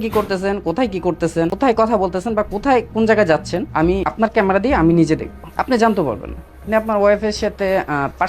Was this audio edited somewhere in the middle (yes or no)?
yes